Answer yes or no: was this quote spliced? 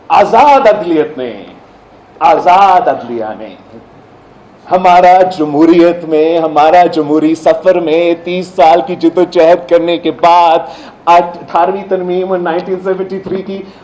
no